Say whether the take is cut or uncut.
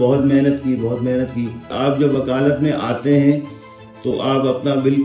cut